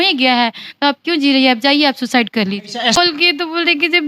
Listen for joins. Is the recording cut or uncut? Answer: cut